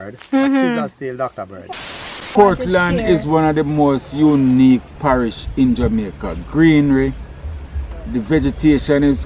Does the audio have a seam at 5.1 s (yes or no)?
no